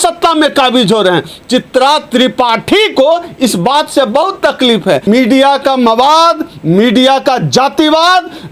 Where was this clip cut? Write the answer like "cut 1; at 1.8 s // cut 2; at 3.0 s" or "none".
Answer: cut 1; at 5.0 s